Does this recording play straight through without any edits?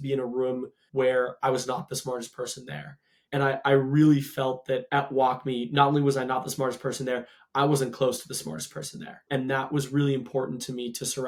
yes; 0 cuts

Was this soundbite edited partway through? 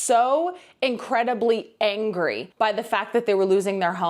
no; 0 cuts

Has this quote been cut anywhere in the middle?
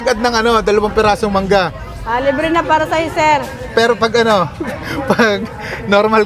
no; 0 cuts

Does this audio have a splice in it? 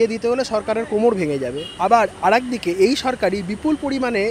yes; 1 cut; at 1.6 s

